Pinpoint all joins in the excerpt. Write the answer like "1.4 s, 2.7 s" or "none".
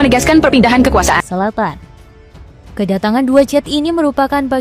1.2 s